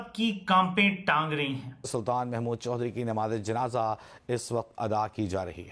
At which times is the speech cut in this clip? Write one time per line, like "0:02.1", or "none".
0:01.8